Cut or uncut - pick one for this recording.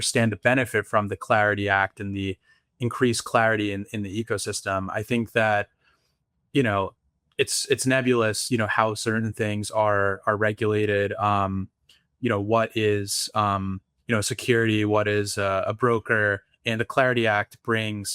uncut